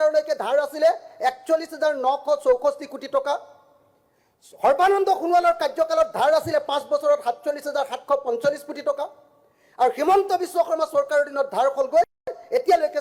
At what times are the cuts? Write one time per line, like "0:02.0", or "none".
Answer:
none